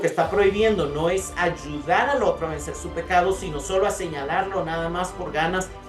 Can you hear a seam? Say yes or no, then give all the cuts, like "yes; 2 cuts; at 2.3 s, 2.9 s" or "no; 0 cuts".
no; 0 cuts